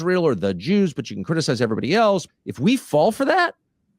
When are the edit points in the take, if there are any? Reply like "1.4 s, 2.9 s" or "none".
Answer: 2.3 s